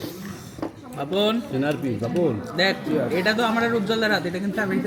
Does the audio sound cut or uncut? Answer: uncut